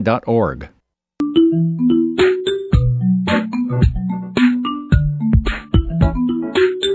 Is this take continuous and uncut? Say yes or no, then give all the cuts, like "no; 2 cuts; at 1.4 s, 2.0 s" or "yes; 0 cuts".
no; 1 cut; at 1.2 s